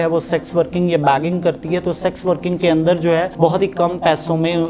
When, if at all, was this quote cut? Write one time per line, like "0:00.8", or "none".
0:03.3